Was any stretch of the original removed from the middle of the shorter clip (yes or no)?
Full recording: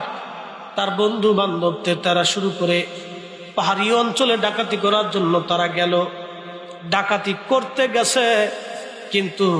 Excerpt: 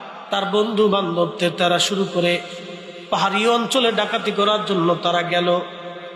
no